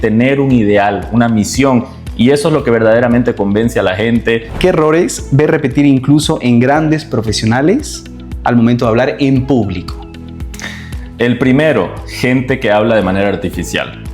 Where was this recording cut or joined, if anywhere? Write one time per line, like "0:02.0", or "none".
0:04.5